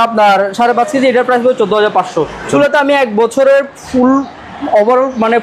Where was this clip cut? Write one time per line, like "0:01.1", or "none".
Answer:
0:02.5